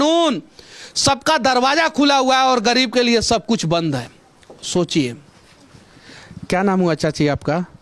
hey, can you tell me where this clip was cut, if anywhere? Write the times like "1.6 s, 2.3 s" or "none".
none